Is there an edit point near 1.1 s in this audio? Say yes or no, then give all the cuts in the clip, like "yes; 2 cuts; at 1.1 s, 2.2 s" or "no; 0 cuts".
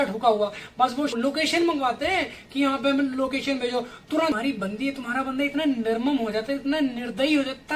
yes; 2 cuts; at 1.1 s, 4.3 s